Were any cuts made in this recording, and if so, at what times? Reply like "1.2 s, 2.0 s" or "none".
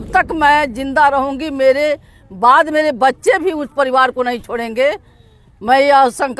none